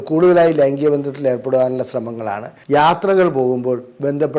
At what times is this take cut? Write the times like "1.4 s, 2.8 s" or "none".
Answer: 2.5 s

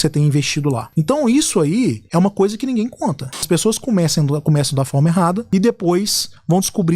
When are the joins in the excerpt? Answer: 0.8 s, 2.0 s, 3.4 s, 5.4 s

